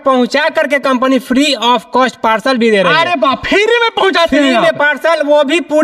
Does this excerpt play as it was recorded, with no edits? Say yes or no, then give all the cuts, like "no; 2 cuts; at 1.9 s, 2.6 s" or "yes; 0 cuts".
yes; 0 cuts